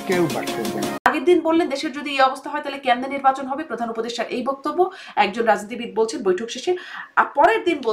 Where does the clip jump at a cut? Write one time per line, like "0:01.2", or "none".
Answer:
0:01.1